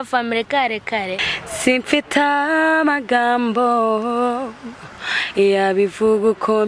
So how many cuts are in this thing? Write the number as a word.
one